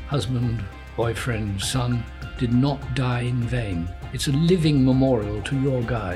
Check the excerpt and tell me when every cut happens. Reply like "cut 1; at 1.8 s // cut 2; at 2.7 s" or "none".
cut 1; at 4.0 s